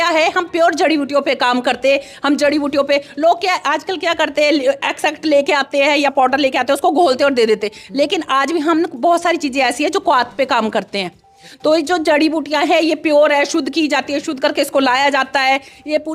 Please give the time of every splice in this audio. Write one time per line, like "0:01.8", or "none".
none

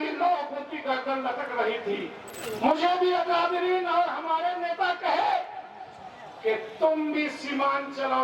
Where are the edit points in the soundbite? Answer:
0:02.3

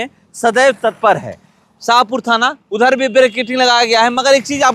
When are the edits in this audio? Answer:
none

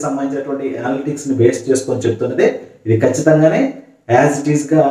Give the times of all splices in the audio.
none

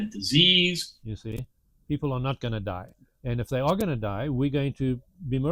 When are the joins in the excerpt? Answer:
0:00.9

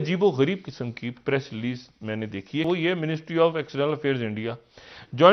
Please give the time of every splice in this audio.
0:02.7

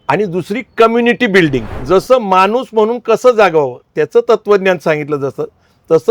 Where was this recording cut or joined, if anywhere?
0:01.7

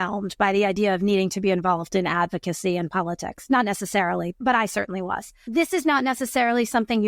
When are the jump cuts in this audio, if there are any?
0:04.4
0:05.4

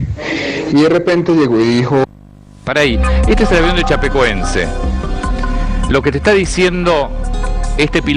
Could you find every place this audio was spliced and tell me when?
none

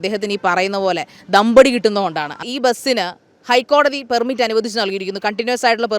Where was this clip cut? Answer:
0:02.4

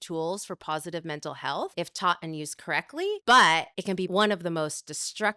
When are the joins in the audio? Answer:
0:01.7
0:03.2
0:04.0

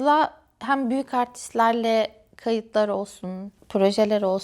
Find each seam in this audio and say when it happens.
0:03.5

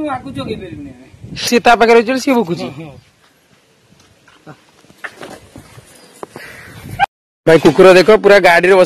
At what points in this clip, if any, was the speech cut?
0:01.5
0:07.0

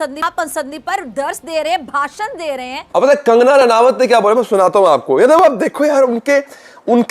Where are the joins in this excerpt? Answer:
0:02.8

